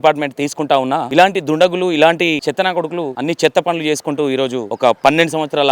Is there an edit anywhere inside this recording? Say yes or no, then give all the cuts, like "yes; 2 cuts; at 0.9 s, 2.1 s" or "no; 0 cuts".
yes; 3 cuts; at 1.1 s, 3.0 s, 4.6 s